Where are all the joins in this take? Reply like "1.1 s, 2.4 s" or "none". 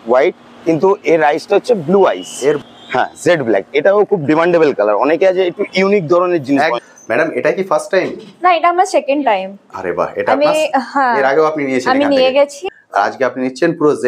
2.6 s, 6.8 s, 12.6 s